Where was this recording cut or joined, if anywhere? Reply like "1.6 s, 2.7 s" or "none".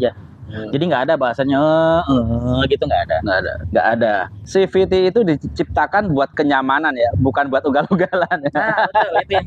4.3 s

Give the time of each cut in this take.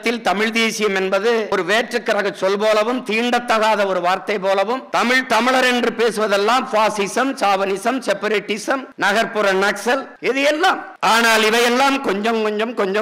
none

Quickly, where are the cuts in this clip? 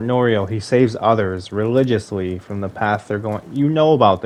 none

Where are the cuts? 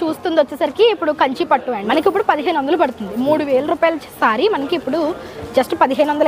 1.9 s

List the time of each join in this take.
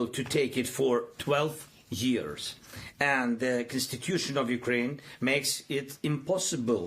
none

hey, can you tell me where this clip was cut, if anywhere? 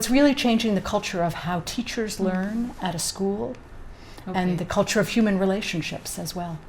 none

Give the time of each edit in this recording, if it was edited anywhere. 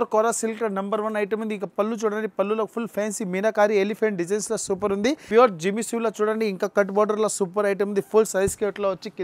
5.2 s

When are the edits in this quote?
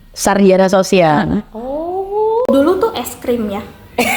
none

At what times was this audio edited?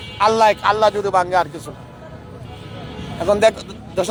none

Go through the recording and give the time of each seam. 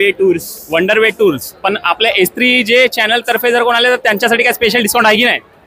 none

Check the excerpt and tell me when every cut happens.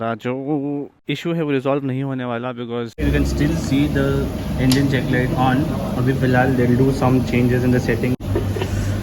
0.9 s, 3.0 s, 8.2 s

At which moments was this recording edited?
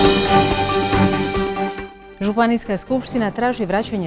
1.8 s

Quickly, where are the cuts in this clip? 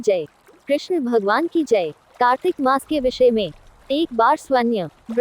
2.0 s

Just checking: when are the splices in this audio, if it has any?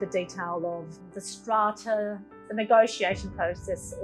2.4 s

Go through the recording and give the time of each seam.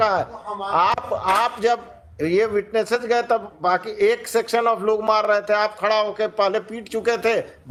none

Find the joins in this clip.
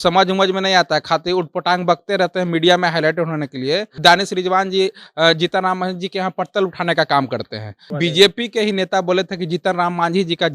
3.9 s, 7.9 s

